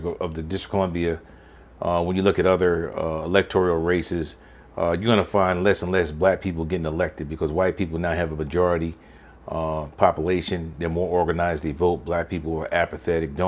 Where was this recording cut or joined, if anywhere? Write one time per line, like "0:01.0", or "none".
none